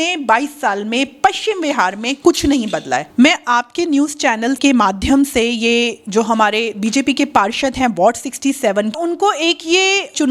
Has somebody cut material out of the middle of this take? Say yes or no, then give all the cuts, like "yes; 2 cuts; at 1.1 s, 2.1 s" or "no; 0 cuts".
yes; 2 cuts; at 3.1 s, 8.9 s